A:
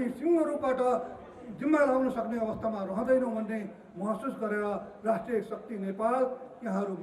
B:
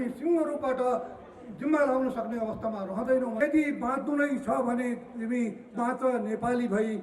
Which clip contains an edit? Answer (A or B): B